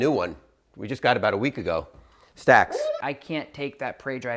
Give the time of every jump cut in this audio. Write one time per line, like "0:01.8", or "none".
0:03.0